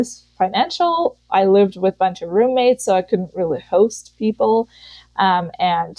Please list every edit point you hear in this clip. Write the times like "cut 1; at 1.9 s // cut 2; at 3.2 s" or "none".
none